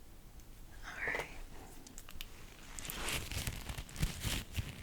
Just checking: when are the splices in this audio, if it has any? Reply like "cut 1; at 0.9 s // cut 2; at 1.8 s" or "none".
cut 1; at 2.5 s